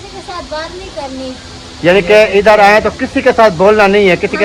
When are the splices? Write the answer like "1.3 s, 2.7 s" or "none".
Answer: none